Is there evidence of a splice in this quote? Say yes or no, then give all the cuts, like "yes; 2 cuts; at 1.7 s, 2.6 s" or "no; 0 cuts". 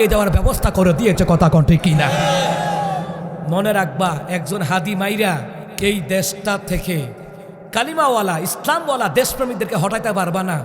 yes; 1 cut; at 5.6 s